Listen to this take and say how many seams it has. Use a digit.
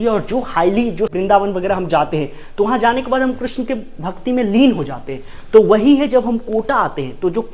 1